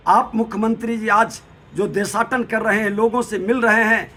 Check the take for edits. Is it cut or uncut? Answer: uncut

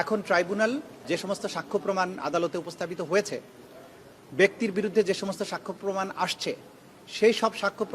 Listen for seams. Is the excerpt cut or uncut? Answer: cut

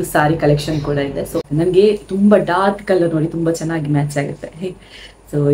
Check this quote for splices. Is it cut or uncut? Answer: cut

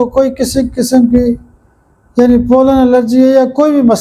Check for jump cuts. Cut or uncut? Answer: uncut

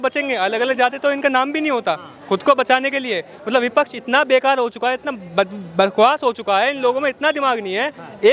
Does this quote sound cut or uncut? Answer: uncut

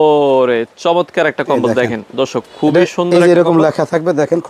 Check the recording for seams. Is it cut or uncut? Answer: uncut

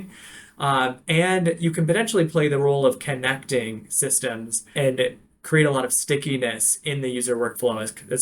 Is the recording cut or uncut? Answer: cut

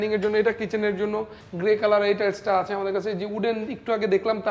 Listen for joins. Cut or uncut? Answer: cut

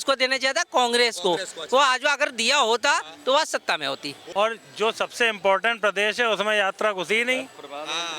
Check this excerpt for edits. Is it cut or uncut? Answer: cut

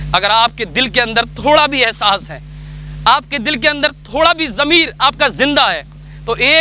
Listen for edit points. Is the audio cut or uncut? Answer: uncut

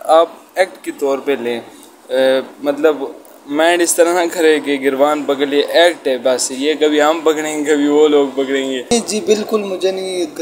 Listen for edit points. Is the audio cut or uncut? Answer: cut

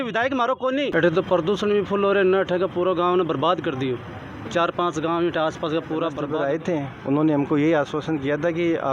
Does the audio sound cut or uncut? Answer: cut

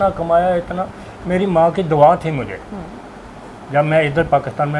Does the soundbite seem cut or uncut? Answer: uncut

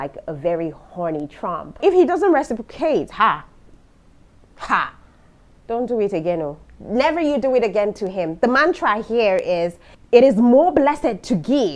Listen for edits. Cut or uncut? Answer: cut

